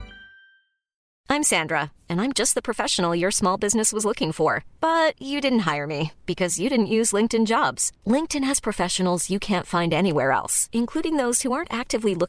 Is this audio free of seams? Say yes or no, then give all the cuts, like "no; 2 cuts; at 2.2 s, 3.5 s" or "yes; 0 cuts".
no; 1 cut; at 1.0 s